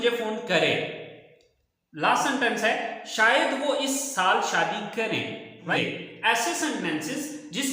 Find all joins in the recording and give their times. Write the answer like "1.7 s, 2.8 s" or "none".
5.7 s